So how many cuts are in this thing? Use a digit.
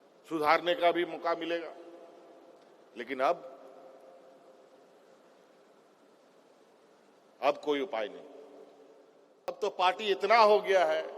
1